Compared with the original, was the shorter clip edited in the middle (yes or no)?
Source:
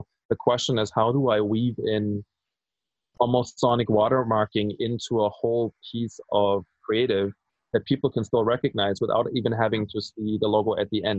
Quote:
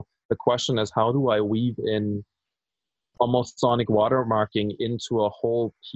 no